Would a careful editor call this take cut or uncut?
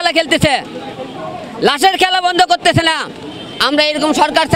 uncut